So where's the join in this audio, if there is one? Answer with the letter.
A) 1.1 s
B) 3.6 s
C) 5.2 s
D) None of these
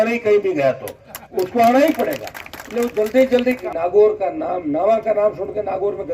B